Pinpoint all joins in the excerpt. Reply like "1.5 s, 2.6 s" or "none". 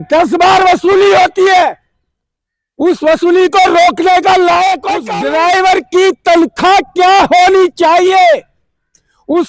5.0 s